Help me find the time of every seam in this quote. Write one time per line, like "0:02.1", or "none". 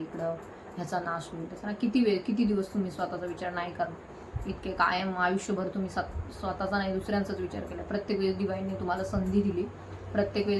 none